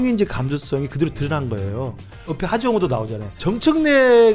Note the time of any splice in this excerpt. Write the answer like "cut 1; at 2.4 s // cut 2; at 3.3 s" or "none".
cut 1; at 2.3 s // cut 2; at 3.4 s